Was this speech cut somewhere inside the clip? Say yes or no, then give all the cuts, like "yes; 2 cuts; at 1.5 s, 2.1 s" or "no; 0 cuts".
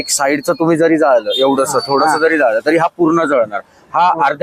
no; 0 cuts